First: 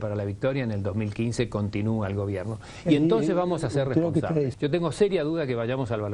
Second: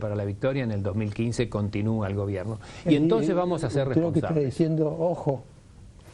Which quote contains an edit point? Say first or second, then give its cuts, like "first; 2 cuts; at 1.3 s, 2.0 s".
first; 1 cut; at 4.5 s